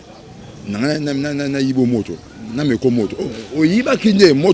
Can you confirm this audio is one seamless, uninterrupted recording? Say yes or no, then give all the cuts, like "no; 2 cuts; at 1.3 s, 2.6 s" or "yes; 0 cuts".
yes; 0 cuts